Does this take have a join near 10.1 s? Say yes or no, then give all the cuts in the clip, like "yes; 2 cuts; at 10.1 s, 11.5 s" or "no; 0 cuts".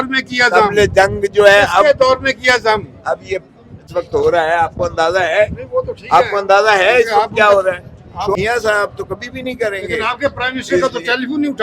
no; 2 cuts; at 3.9 s, 8.4 s